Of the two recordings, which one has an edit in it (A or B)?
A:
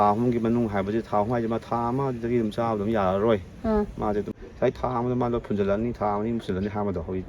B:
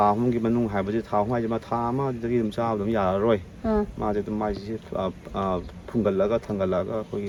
A